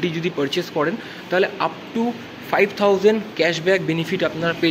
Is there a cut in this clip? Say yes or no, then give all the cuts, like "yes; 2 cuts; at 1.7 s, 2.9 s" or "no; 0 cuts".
no; 0 cuts